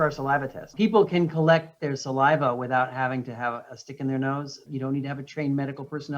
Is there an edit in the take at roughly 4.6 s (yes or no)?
yes